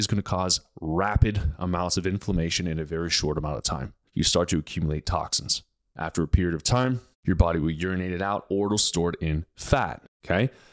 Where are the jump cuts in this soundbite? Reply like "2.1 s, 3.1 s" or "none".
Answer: 4.0 s, 5.8 s, 7.1 s

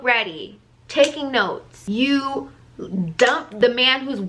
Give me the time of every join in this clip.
1.7 s, 3.5 s

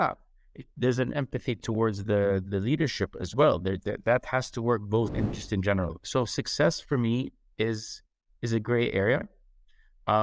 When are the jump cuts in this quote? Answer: 5.1 s

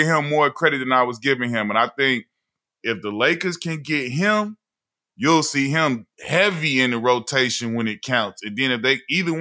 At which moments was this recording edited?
none

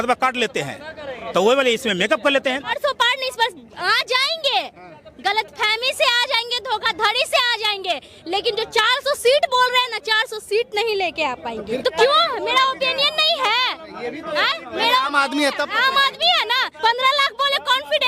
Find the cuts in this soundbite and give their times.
2.7 s, 11.8 s, 16.7 s

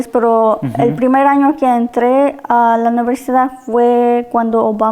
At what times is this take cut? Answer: none

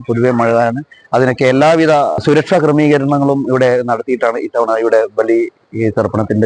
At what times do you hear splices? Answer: 2.2 s

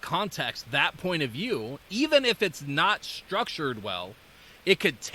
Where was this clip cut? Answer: none

